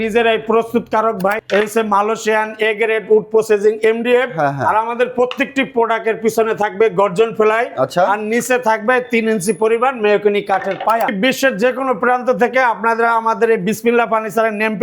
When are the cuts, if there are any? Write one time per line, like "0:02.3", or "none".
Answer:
0:01.4
0:11.1